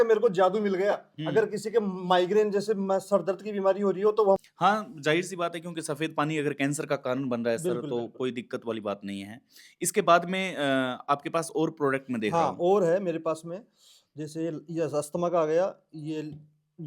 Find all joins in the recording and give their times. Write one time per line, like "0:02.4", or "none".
0:04.4